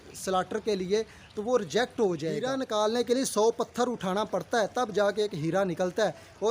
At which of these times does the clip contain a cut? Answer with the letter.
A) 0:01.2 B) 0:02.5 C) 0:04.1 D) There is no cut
B